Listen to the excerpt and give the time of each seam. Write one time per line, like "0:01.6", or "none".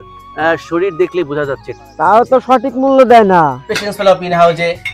0:01.7
0:03.7

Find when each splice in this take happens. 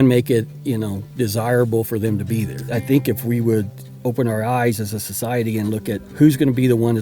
0:02.6
0:03.8
0:06.0

